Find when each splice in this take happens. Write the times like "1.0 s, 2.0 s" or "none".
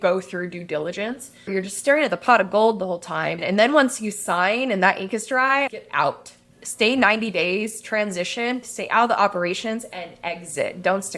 1.5 s, 3.4 s, 5.7 s, 8.6 s